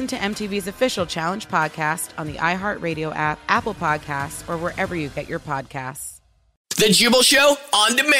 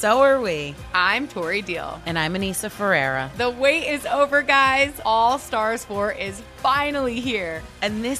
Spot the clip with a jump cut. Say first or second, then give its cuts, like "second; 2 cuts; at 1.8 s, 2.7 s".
first; 1 cut; at 6.7 s